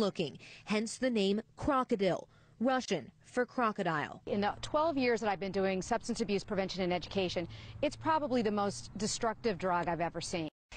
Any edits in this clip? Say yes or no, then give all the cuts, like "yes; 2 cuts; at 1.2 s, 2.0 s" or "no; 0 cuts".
yes; 1 cut; at 7.7 s